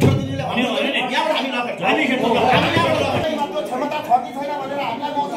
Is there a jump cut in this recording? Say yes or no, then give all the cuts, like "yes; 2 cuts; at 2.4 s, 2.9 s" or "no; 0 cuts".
yes; 1 cut; at 3.3 s